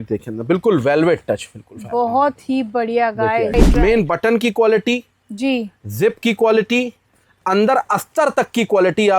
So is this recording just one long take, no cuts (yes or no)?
no